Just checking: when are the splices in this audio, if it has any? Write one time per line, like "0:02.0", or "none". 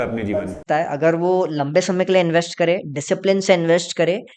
none